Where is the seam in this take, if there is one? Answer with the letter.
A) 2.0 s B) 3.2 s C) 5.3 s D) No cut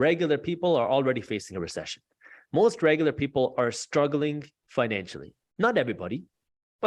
D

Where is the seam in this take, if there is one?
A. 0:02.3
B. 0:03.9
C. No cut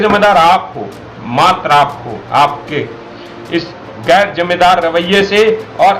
C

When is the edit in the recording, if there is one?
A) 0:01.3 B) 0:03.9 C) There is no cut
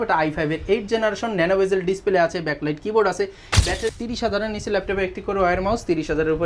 B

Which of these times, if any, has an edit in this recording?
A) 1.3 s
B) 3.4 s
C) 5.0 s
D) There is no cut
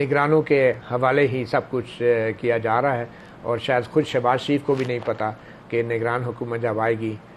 D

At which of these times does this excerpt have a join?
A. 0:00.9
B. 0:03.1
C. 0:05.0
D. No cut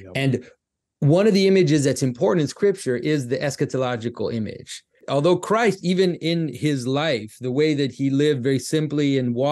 C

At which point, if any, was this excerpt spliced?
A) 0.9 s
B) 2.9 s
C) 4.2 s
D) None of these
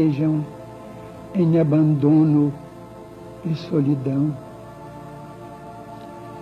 C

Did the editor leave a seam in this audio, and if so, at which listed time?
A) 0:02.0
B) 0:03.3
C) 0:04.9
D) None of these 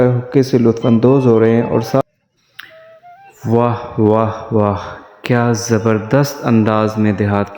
A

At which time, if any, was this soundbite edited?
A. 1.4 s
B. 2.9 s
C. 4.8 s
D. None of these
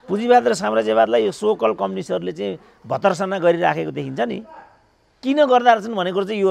D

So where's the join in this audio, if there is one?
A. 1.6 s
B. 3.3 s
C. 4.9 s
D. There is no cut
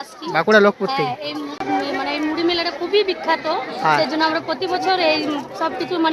A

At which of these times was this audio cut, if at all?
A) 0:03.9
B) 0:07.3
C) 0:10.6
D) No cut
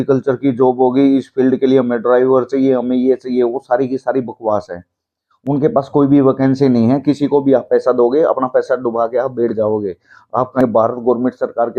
C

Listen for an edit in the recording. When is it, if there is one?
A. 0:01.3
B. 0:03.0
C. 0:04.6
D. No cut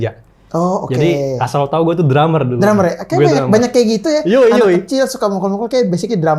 D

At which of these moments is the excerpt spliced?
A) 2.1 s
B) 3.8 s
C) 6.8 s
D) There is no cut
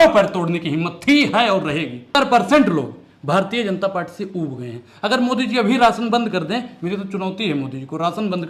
A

